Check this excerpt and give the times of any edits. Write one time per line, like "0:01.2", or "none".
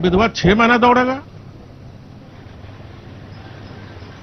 none